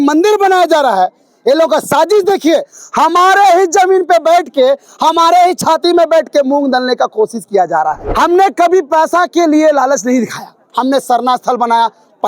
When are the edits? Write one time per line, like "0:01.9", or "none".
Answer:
0:08.0